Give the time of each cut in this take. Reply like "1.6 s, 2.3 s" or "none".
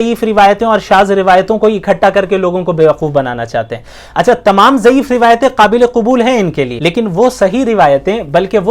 6.7 s